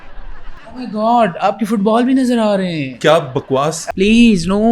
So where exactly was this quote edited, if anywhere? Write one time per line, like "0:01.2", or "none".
0:03.8